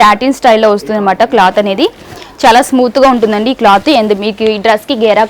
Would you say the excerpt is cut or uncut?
uncut